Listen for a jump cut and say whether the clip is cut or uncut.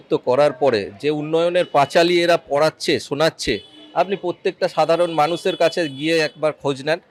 uncut